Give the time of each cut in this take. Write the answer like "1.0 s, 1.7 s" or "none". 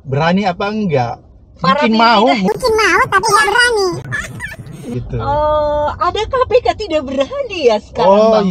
none